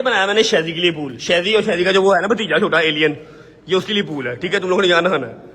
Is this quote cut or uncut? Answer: uncut